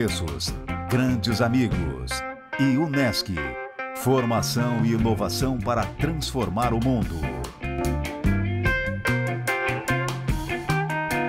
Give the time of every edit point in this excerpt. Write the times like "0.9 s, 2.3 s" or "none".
none